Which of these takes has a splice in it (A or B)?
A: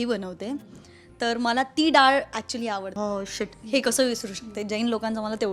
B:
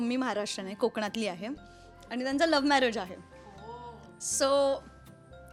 A